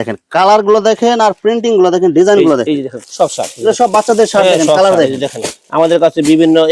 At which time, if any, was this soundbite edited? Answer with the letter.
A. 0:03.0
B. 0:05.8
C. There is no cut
A